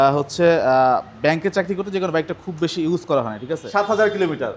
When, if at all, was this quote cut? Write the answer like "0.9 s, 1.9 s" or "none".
3.6 s